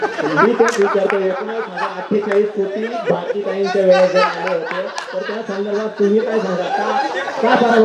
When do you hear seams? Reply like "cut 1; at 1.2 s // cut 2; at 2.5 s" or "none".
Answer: none